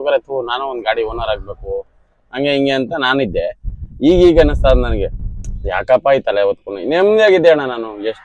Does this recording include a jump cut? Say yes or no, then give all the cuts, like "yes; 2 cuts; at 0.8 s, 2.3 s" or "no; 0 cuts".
no; 0 cuts